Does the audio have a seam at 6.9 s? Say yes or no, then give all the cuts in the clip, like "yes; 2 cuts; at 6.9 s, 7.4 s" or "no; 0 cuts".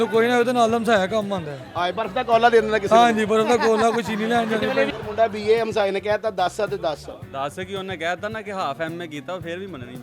no; 1 cut; at 4.9 s